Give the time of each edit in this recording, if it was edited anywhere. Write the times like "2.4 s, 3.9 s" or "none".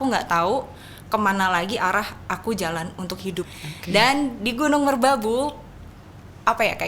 3.5 s